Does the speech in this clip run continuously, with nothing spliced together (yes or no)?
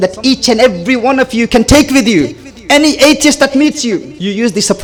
yes